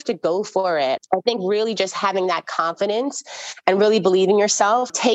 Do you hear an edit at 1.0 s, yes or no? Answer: yes